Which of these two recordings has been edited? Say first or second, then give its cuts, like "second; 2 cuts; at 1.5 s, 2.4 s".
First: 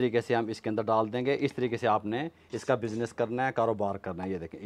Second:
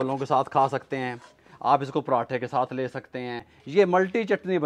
second; 1 cut; at 3.5 s